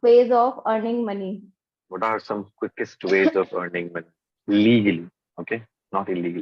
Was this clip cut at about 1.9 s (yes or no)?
yes